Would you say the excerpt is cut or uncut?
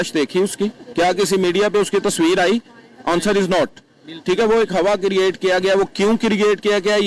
uncut